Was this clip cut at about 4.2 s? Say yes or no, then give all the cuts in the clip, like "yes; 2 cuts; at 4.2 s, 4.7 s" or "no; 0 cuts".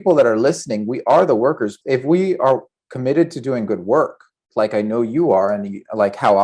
no; 1 cut; at 1.8 s